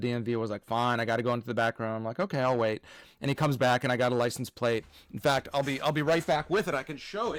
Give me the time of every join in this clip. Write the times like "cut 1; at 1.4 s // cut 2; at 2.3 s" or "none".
none